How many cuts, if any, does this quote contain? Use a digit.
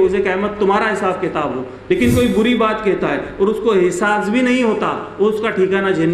1